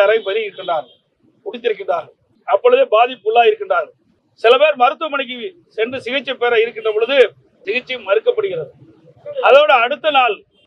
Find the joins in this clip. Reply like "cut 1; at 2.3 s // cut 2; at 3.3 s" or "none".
none